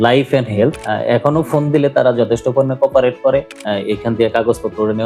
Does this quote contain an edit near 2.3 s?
no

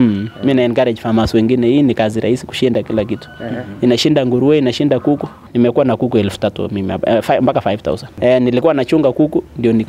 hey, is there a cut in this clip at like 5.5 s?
yes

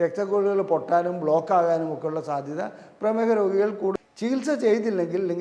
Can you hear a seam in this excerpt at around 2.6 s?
no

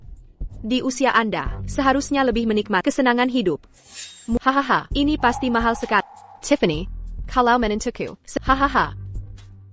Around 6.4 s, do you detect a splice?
no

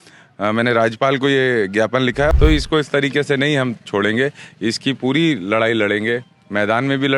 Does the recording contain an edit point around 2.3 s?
yes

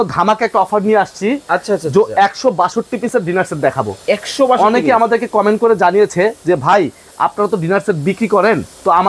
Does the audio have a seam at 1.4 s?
no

